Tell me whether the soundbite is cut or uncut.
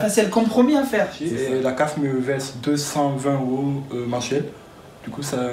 cut